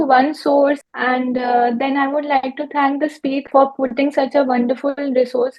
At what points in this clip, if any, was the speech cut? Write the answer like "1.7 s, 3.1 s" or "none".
0.8 s, 3.5 s